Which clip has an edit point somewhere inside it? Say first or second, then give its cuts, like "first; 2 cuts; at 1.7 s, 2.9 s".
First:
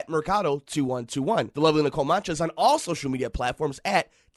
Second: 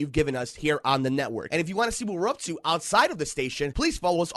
second; 1 cut; at 1.4 s